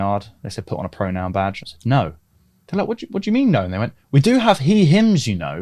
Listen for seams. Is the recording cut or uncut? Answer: uncut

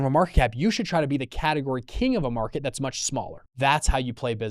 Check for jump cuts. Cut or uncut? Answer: cut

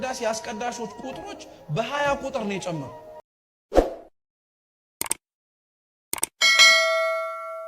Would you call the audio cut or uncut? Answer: cut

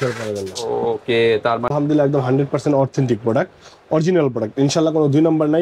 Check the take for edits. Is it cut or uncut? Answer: cut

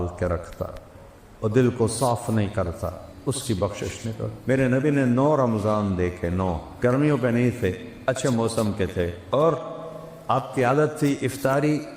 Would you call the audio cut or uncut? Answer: cut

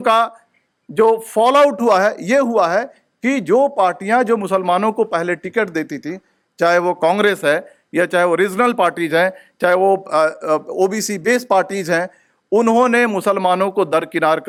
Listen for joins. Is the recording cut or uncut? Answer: uncut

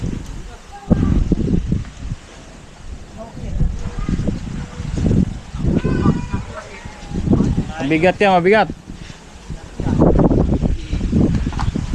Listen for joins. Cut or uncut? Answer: uncut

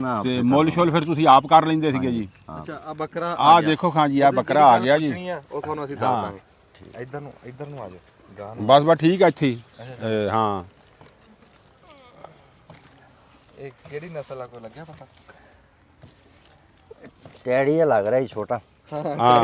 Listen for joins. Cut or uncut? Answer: uncut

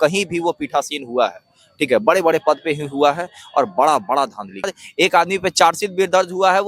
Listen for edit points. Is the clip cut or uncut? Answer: cut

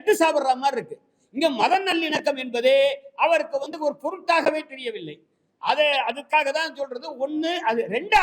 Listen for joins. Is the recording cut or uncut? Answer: uncut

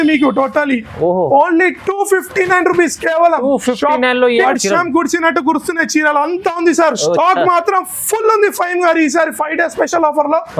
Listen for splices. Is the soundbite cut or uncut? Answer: cut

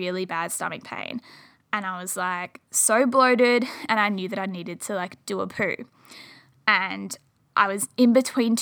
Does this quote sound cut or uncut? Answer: uncut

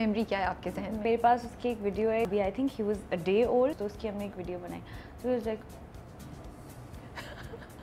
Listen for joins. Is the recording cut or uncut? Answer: cut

